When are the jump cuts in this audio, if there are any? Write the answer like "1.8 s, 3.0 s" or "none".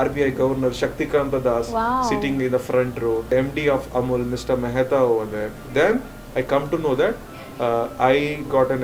3.3 s, 5.6 s